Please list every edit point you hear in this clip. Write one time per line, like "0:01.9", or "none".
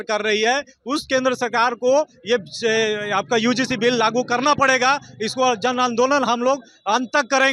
none